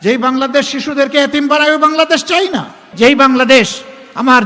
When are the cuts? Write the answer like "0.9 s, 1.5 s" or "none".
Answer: 2.8 s